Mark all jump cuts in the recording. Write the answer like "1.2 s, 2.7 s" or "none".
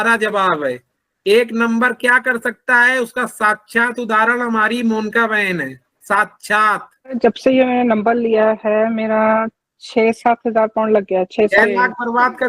7.1 s, 11.5 s